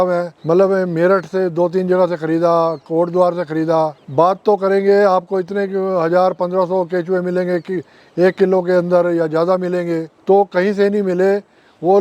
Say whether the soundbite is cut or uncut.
cut